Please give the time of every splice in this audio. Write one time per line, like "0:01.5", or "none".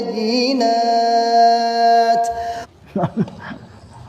0:02.6